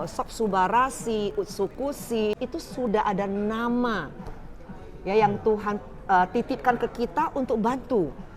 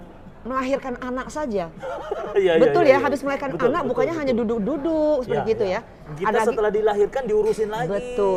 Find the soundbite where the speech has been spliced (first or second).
first